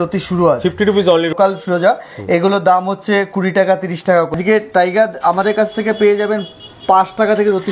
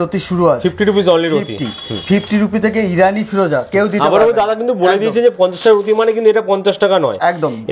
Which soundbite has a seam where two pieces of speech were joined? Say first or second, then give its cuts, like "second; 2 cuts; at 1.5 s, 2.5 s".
first; 2 cuts; at 1.3 s, 4.4 s